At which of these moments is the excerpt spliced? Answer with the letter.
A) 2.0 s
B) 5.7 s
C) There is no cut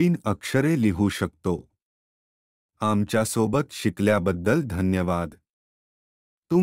A